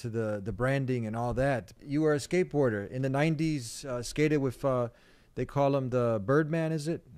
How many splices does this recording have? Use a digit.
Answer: 1